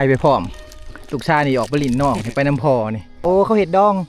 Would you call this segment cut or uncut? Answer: cut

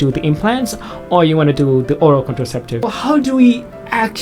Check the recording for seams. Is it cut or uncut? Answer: cut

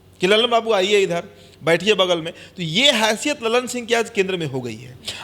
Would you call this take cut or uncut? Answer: uncut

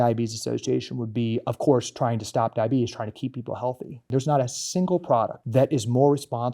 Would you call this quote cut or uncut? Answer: cut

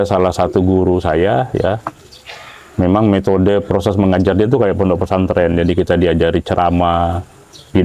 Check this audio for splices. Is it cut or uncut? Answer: uncut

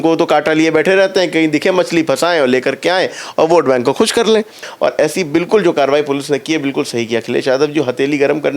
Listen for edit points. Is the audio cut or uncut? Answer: cut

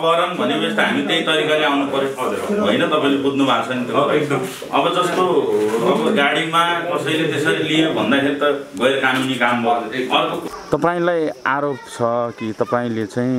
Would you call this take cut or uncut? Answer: cut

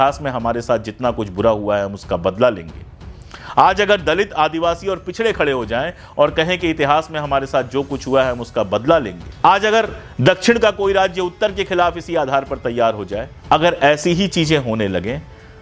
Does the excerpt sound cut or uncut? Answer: cut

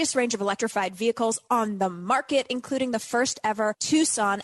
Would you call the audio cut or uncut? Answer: uncut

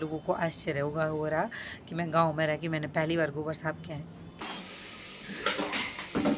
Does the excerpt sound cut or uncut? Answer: cut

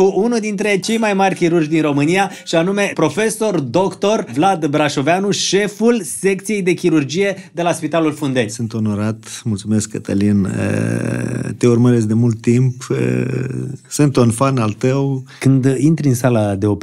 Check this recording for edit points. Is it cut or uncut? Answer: cut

